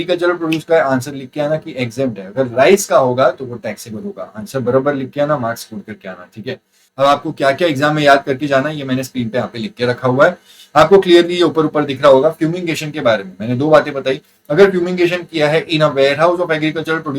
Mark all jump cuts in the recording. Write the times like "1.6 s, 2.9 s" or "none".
6.8 s